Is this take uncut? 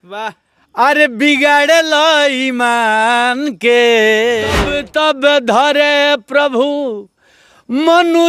no; 1 cut; at 4.8 s

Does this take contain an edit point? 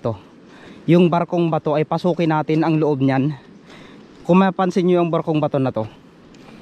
no; 0 cuts

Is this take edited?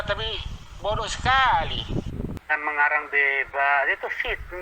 yes; 1 cut; at 2.4 s

